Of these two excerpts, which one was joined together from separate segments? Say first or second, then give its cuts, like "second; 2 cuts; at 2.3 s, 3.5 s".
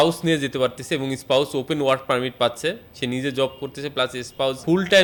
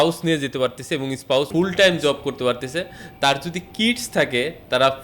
second; 1 cut; at 1.5 s